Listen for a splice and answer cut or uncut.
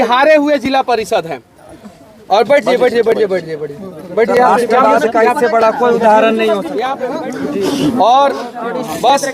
cut